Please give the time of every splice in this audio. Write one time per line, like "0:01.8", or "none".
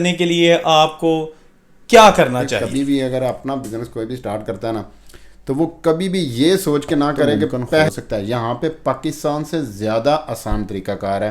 0:02.6
0:07.9